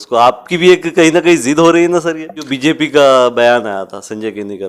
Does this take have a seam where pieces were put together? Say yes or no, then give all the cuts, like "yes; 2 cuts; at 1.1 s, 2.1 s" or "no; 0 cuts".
yes; 1 cut; at 2.5 s